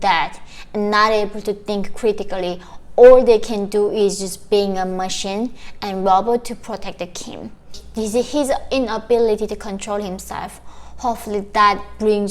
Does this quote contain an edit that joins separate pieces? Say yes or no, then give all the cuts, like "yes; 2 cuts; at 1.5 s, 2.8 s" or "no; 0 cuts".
yes; 1 cut; at 7.8 s